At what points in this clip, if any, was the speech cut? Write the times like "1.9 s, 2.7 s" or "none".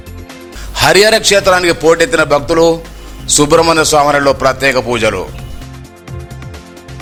none